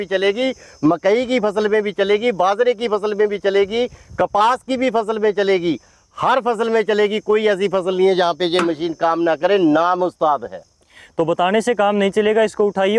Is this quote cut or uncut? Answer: uncut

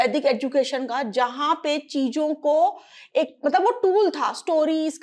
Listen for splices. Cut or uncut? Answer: uncut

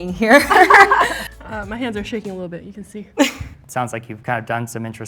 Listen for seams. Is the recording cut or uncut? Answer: cut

